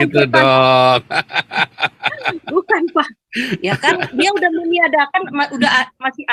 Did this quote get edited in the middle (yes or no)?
no